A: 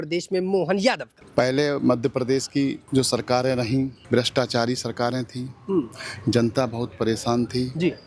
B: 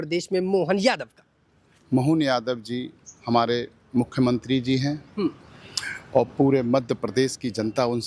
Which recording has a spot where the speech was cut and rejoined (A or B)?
A